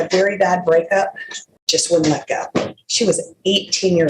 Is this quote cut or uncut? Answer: uncut